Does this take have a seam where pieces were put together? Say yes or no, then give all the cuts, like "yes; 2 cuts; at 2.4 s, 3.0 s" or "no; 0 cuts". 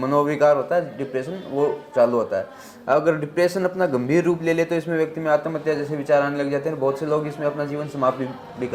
no; 0 cuts